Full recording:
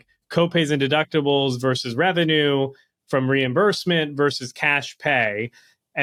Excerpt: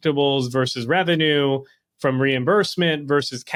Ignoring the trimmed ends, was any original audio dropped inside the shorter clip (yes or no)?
no